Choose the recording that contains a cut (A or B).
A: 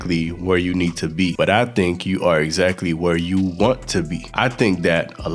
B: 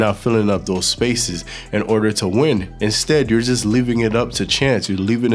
A